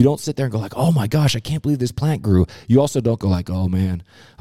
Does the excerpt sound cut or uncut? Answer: uncut